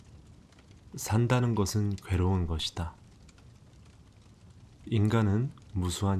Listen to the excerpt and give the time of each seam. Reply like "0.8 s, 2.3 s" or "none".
0.9 s